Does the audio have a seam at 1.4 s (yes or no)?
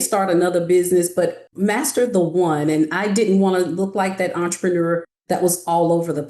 yes